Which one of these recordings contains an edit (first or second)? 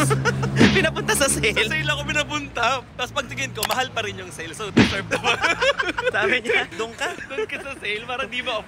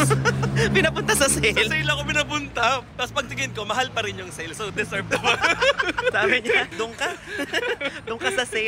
first